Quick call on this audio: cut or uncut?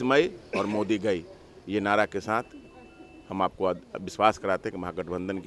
uncut